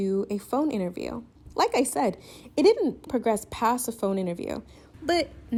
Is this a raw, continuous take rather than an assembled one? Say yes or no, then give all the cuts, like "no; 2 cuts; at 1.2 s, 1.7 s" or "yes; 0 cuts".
yes; 0 cuts